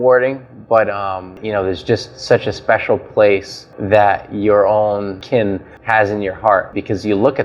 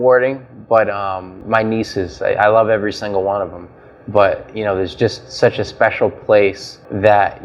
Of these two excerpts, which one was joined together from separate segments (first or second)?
first